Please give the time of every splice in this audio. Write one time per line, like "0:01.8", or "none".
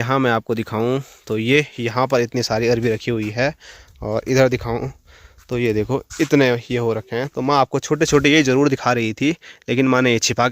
none